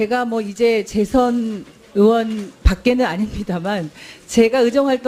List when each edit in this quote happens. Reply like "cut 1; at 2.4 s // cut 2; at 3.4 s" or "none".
none